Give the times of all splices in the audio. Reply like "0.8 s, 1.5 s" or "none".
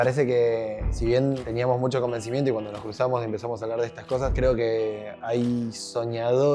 0.9 s, 4.3 s